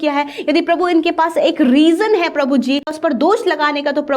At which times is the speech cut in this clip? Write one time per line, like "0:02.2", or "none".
0:03.0